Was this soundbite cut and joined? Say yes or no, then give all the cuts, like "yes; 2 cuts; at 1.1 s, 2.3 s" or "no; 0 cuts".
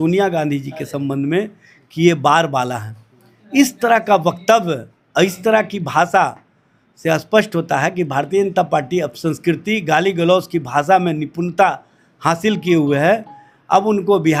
no; 0 cuts